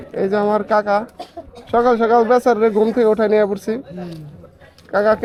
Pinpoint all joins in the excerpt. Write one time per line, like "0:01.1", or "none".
none